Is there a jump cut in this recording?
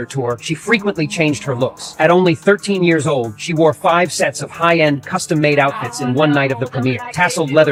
no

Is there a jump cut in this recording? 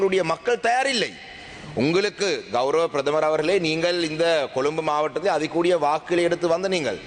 no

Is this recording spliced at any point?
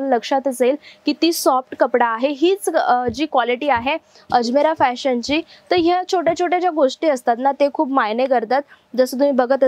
no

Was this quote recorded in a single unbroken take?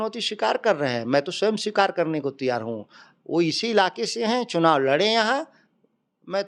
yes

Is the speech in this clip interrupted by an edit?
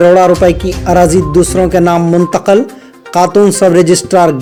no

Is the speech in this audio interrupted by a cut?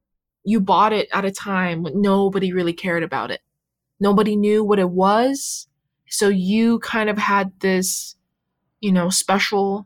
no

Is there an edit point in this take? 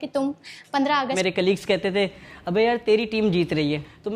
yes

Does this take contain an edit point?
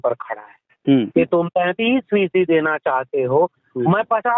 yes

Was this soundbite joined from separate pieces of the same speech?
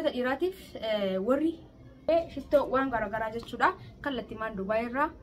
yes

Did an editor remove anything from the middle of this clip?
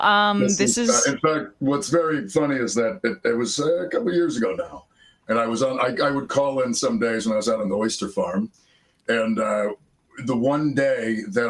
no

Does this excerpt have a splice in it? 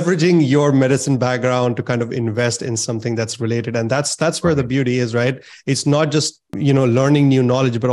yes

